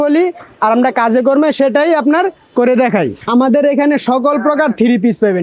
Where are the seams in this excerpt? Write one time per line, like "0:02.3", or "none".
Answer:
0:03.2